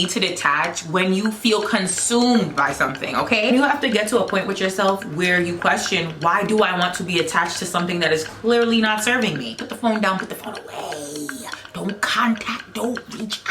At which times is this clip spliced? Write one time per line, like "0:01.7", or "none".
0:03.5
0:09.7